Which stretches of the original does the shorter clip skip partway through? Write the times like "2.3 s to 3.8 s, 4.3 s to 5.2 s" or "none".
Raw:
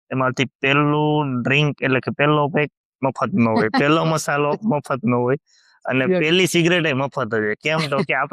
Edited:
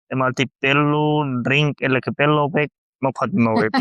none